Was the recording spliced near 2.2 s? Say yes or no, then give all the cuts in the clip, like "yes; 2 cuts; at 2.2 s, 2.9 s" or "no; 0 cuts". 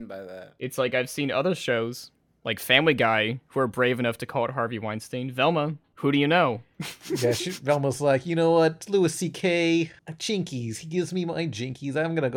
no; 2 cuts; at 5.8 s, 10.1 s